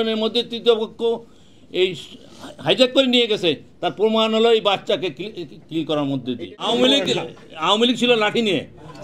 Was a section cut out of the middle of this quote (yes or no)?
yes